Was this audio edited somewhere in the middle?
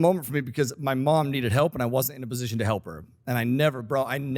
no; 0 cuts

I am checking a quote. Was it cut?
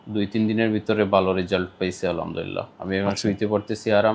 no; 0 cuts

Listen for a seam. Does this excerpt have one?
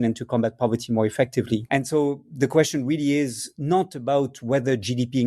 yes; 1 cut; at 1.6 s

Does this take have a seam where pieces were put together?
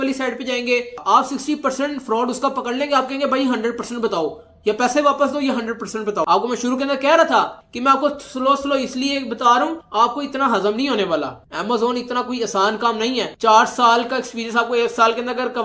yes; 1 cut; at 6.3 s

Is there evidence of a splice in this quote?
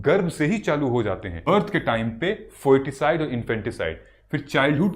yes; 1 cut; at 1.4 s

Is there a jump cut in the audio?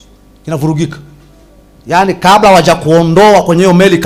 no; 0 cuts

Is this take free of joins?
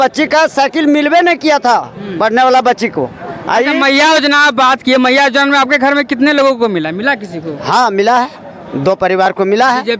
yes; 0 cuts

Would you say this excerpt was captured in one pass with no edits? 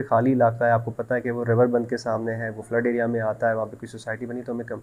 yes; 0 cuts

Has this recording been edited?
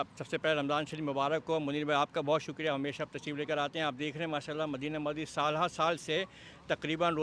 no; 0 cuts

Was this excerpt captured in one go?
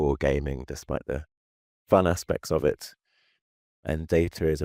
yes; 0 cuts

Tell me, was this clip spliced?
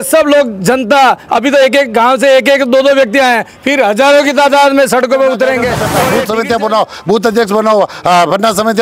yes; 1 cut; at 6.0 s

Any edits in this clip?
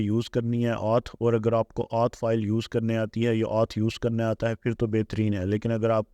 no; 0 cuts

